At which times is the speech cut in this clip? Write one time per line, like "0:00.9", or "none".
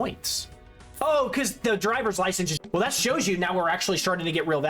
0:02.6